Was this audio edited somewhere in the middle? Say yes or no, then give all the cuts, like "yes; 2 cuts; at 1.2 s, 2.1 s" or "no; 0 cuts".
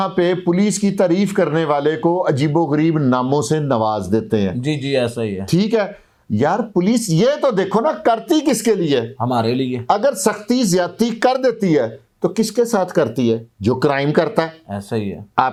no; 0 cuts